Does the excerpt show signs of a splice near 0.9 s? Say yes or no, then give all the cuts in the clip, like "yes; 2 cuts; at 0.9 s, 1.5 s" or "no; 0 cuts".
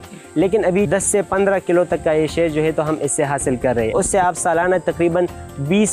yes; 2 cuts; at 0.9 s, 3.9 s